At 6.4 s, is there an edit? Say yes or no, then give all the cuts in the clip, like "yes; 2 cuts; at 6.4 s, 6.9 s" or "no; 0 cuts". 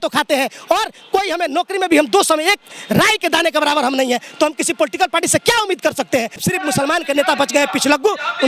yes; 1 cut; at 6.4 s